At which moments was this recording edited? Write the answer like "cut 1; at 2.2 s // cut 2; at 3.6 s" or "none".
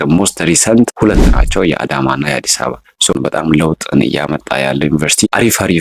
cut 1; at 3.1 s